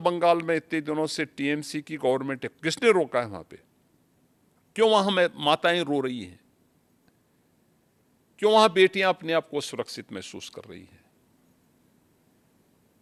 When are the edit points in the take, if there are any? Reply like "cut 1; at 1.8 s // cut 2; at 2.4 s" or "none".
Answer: none